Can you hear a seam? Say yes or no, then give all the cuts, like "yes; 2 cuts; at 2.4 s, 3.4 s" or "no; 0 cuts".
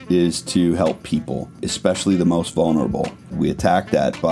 yes; 2 cuts; at 1.7 s, 3.3 s